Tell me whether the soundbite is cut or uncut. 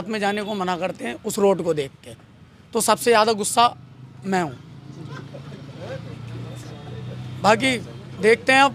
uncut